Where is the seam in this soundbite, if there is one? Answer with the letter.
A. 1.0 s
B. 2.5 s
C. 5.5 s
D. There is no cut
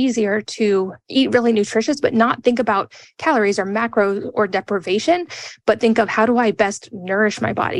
A